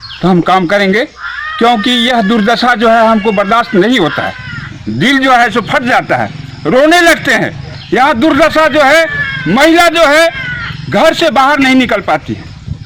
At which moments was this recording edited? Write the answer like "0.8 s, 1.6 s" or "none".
none